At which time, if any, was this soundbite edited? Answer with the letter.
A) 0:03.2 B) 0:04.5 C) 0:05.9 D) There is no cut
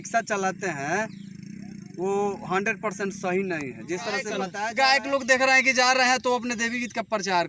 B